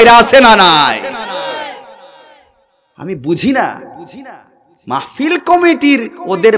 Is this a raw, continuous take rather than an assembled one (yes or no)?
yes